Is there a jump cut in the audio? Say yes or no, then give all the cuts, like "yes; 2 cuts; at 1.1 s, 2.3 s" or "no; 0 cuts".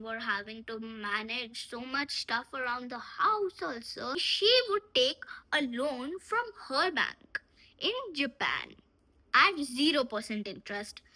yes; 1 cut; at 4.3 s